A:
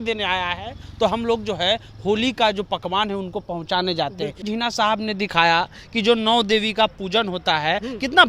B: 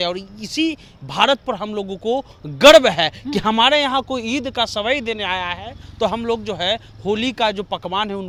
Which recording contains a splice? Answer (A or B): A